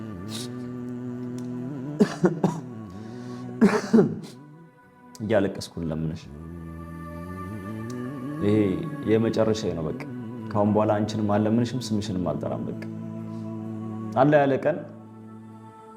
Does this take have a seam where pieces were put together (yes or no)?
yes